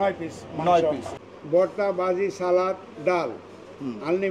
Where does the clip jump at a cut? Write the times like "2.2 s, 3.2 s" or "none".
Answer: 1.1 s